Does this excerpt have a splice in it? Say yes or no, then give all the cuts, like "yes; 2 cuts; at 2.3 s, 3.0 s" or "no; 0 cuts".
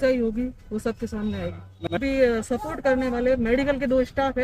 yes; 1 cut; at 1.9 s